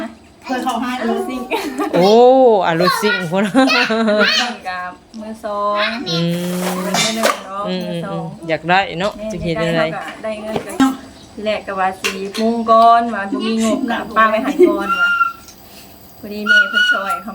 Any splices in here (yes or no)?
yes